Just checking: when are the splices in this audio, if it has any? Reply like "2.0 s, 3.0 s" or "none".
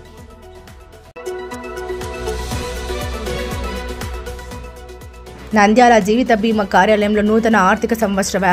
1.1 s